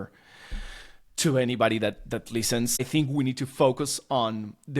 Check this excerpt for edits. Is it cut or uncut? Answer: cut